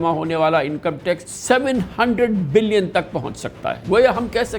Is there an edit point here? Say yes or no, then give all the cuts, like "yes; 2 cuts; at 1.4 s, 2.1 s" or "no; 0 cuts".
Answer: yes; 2 cuts; at 1.3 s, 3.8 s